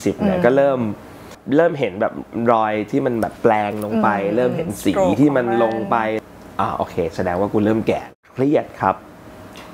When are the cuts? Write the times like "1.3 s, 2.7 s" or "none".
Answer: 1.4 s, 6.2 s, 8.1 s